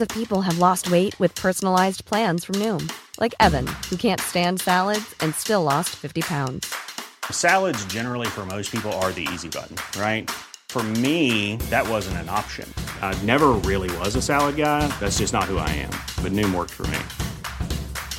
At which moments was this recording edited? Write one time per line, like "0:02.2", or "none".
none